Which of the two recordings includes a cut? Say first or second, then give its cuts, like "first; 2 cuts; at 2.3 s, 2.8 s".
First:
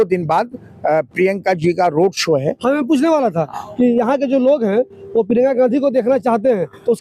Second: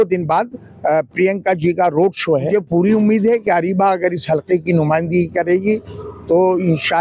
second; 1 cut; at 2.5 s